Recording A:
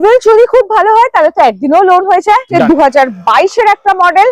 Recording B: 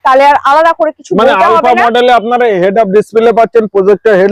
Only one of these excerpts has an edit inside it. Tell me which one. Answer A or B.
A